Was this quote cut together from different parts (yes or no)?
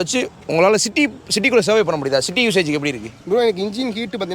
yes